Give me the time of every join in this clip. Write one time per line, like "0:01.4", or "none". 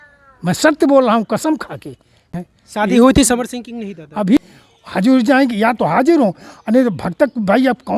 0:02.2
0:04.4